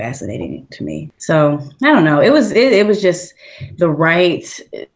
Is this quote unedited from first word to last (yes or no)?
no